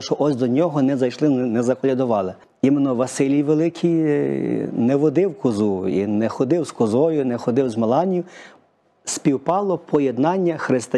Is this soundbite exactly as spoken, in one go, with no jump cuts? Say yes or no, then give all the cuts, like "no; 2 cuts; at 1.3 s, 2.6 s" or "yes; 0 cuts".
no; 1 cut; at 2.4 s